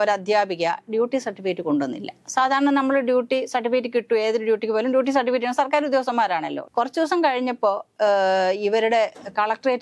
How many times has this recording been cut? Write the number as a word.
one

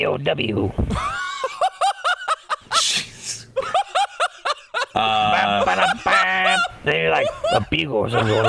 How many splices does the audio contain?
zero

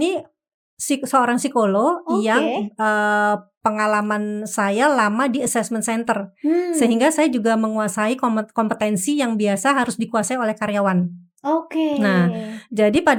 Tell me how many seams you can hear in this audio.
zero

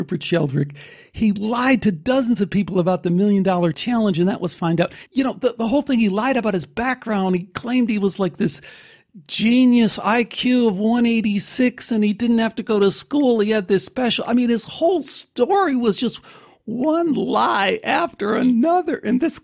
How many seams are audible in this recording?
two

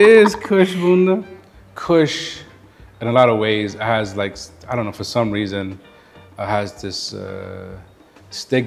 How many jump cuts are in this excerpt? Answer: one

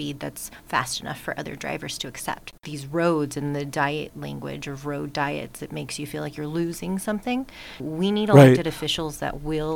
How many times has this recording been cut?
two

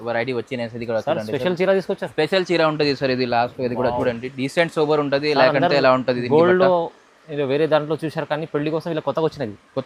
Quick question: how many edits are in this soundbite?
zero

